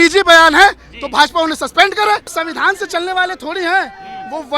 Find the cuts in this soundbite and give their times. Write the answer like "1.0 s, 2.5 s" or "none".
2.4 s